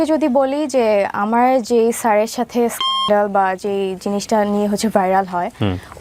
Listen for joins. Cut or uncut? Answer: uncut